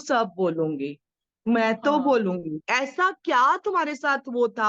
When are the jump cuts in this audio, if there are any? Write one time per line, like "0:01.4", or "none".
0:02.5